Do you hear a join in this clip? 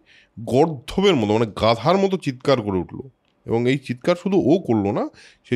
no; 0 cuts

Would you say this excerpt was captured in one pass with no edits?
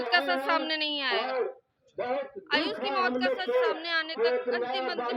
yes; 0 cuts

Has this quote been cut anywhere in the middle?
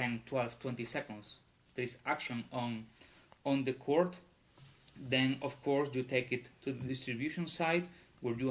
no; 0 cuts

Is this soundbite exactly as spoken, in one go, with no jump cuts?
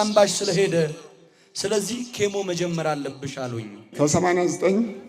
no; 1 cut; at 3.9 s

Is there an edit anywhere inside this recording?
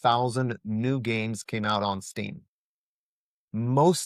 no; 0 cuts

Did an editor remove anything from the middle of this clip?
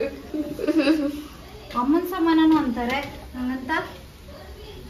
no; 0 cuts

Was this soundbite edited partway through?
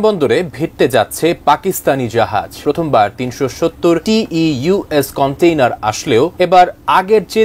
yes; 3 cuts; at 2.5 s, 4.0 s, 6.3 s

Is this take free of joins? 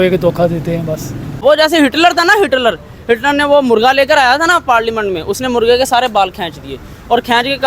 no; 1 cut; at 1.4 s

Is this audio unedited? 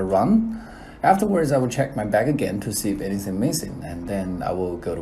no; 1 cut; at 3.9 s

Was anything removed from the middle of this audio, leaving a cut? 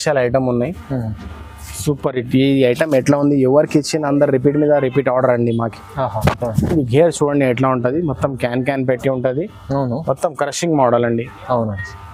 no; 0 cuts

